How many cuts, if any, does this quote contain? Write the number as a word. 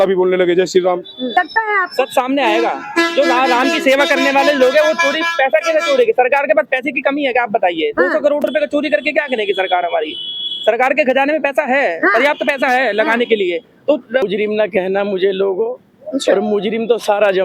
two